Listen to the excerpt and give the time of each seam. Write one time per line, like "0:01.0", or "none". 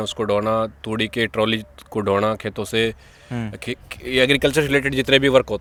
none